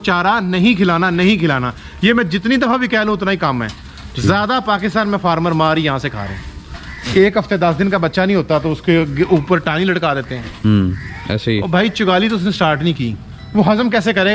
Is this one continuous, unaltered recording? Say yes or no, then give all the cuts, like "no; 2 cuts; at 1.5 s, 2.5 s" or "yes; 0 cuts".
yes; 0 cuts